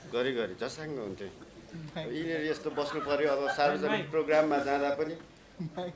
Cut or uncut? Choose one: uncut